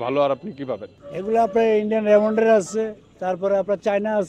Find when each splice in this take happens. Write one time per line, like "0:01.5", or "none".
0:00.9